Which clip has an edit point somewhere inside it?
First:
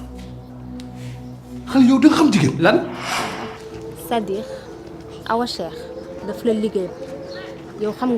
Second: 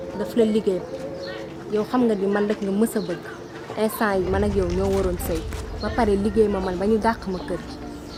first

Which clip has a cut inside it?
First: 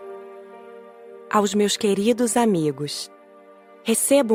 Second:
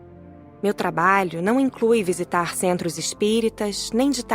second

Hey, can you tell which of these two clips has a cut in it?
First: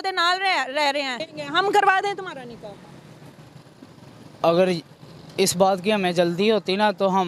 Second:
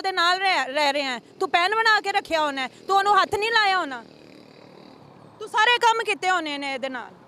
first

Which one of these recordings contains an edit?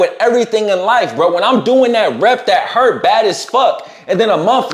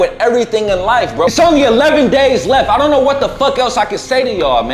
second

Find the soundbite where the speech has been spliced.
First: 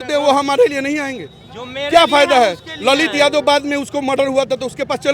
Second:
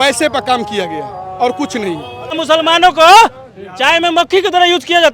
second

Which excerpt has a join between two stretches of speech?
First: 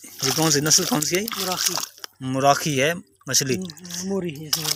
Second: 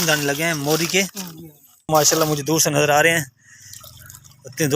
second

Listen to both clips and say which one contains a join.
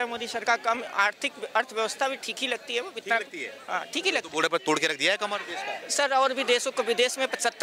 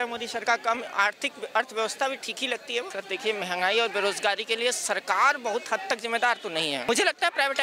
second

